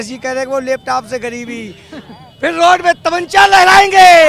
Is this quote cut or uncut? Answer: uncut